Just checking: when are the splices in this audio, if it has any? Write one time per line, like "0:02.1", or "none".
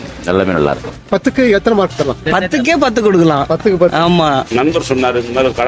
0:00.9
0:04.5